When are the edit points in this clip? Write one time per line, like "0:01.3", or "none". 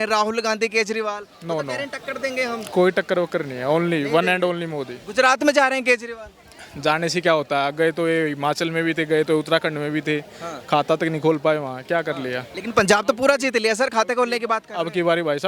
none